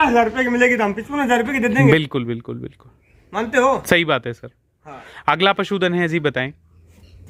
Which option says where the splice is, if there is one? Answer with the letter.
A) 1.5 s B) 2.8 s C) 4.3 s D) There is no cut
D